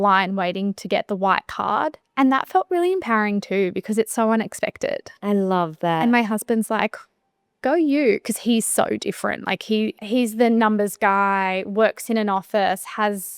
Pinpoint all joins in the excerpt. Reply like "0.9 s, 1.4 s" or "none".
none